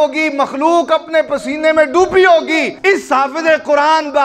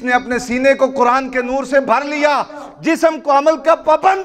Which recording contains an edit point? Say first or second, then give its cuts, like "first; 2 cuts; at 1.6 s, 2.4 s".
first; 1 cut; at 2.7 s